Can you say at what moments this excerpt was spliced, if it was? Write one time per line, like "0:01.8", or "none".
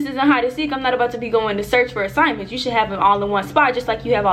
none